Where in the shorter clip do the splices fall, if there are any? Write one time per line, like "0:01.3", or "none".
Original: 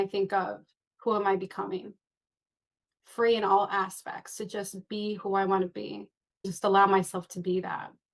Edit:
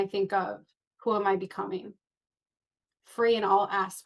none